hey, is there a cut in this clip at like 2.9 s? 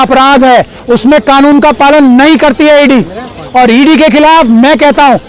no; 0 cuts

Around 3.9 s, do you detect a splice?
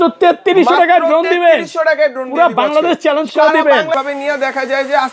yes; 1 cut; at 3.9 s

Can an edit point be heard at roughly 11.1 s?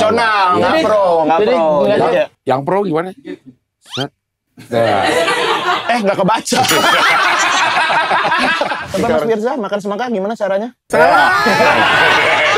no; 1 cut; at 8.8 s

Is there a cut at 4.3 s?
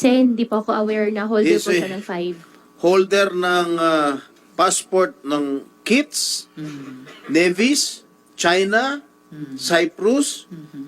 no; 0 cuts

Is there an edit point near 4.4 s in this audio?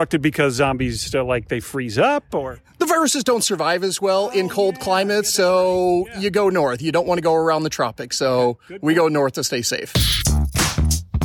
no; 1 cut; at 9.9 s

